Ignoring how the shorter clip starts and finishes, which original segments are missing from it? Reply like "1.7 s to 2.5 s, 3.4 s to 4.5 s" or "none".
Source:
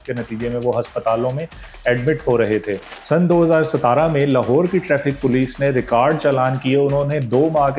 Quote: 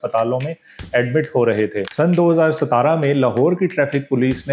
2.8 s to 3.0 s

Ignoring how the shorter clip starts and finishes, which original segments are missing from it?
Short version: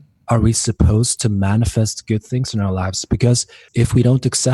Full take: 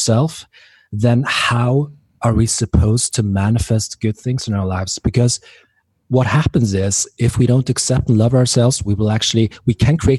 5.5 s to 7.0 s

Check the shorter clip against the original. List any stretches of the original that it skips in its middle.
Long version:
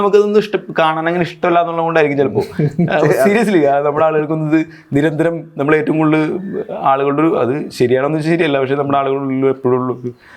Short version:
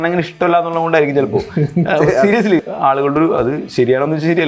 3.6 s to 6.6 s

